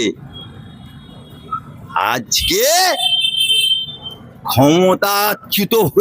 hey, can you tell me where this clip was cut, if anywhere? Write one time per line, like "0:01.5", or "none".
none

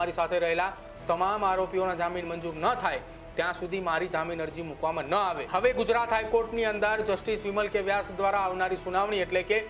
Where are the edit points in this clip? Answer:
0:05.4

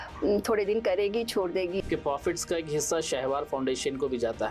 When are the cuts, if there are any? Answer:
0:01.8

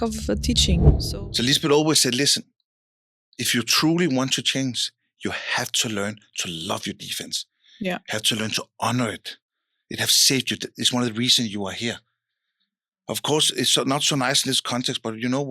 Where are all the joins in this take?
0:01.0

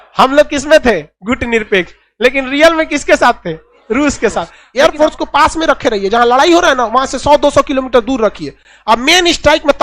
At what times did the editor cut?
0:04.6

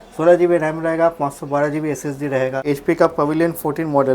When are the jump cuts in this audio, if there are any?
0:02.6

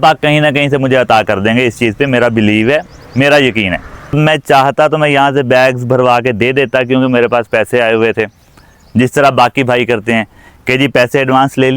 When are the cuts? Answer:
0:04.2

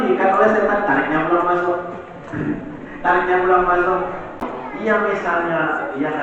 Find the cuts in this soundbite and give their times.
0:04.5

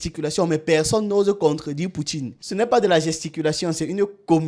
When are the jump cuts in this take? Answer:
0:02.4

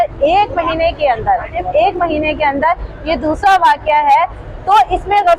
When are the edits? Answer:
none

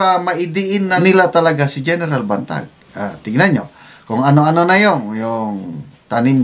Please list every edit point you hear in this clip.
0:01.0

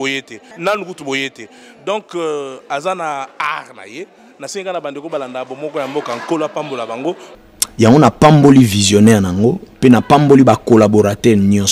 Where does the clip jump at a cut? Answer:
0:01.1

